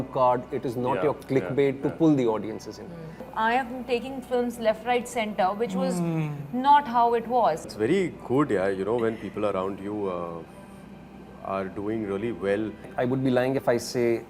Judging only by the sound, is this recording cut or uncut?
cut